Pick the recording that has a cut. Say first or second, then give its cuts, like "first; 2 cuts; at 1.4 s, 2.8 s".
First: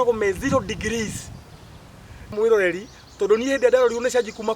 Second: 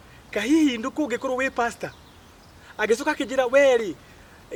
first; 1 cut; at 2.3 s